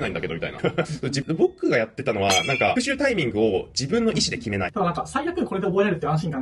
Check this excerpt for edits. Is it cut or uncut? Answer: cut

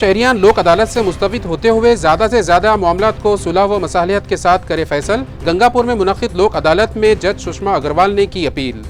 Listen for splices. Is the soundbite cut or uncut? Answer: uncut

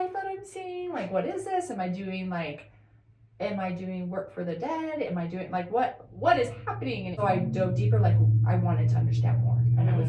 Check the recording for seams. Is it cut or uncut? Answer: cut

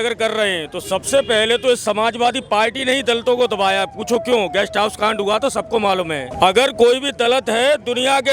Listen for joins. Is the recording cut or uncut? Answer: uncut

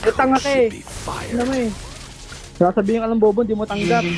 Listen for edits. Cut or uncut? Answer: uncut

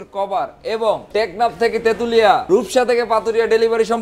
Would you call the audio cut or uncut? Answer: cut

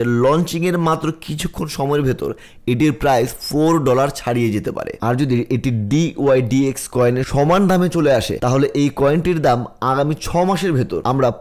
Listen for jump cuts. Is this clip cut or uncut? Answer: cut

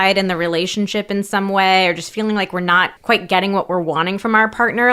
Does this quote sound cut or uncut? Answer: cut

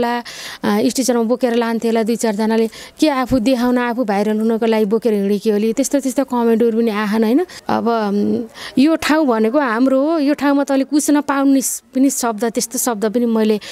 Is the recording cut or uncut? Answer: cut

